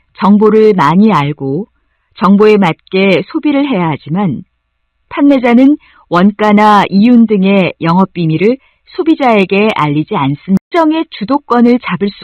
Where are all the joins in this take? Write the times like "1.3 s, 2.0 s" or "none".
10.7 s